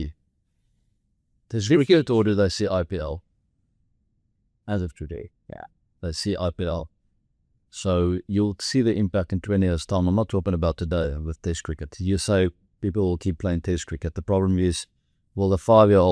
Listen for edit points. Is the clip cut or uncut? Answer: uncut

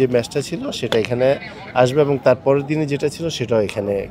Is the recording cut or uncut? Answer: uncut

